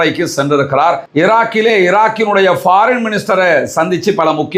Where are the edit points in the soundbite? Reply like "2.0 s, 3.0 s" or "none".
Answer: none